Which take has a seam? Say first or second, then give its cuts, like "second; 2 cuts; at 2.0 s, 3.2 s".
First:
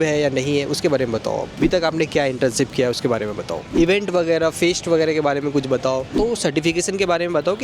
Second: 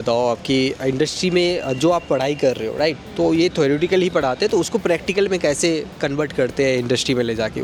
first; 3 cuts; at 1.6 s, 3.7 s, 6.1 s